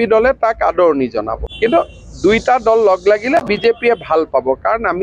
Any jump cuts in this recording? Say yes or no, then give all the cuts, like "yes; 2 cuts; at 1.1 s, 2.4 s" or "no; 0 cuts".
yes; 1 cut; at 1.4 s